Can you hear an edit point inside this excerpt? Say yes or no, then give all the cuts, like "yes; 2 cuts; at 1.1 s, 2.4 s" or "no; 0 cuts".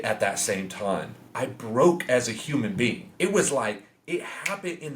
yes; 2 cuts; at 1.2 s, 3.0 s